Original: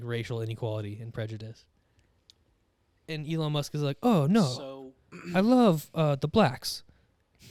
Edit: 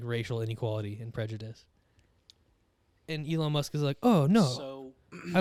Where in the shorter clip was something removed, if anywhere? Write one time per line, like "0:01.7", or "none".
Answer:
none